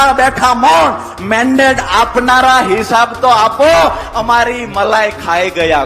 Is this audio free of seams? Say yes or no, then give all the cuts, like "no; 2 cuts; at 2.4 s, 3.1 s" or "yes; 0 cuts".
yes; 0 cuts